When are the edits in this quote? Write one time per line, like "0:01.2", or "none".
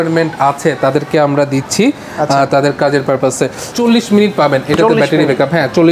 0:03.6